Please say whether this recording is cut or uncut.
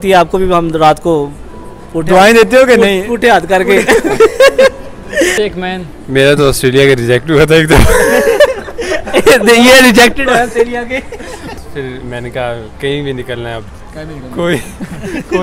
cut